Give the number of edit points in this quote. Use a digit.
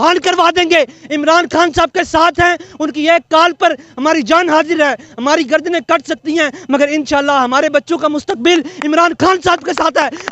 0